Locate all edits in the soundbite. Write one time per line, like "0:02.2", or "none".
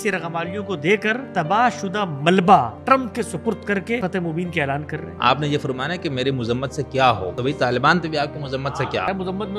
0:01.2
0:02.8
0:04.0
0:05.1
0:07.3
0:08.7